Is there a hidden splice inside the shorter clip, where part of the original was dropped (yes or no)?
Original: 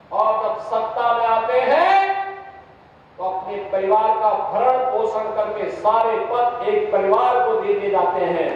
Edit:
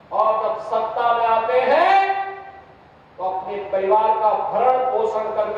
no